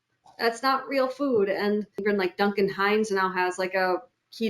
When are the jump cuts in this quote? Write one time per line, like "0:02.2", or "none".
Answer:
0:02.0